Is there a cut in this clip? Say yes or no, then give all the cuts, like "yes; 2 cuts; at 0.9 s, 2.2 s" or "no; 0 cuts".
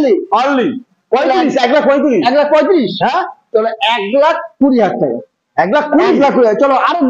no; 0 cuts